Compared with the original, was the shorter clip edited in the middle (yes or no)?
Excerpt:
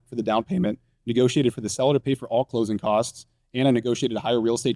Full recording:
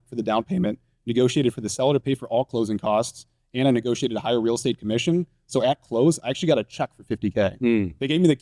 no